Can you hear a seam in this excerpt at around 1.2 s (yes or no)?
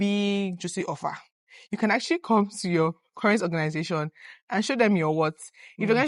no